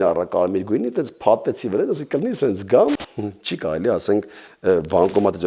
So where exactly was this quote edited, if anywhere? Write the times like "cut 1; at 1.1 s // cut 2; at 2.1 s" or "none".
cut 1; at 3.0 s